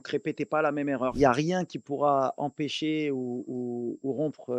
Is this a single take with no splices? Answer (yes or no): no